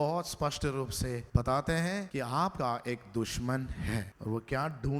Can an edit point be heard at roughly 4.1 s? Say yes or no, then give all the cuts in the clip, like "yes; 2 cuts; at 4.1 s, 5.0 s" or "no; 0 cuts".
yes; 3 cuts; at 1.2 s, 2.5 s, 4.1 s